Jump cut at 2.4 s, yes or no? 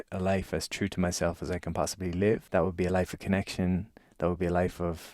yes